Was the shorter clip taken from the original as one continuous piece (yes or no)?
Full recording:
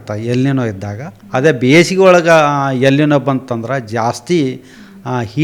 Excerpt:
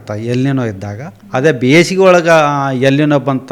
yes